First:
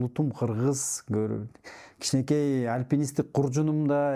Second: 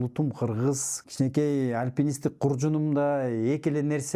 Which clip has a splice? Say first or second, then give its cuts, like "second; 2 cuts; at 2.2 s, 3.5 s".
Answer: second; 1 cut; at 0.9 s